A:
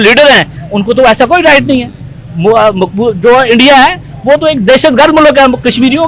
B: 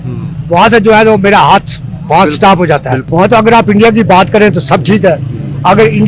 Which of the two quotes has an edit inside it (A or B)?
B